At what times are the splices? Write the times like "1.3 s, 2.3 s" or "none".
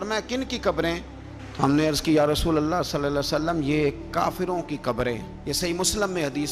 none